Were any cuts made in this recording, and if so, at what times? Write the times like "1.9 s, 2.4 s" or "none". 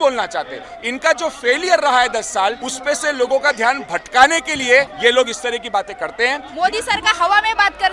2.7 s, 4.9 s, 6.5 s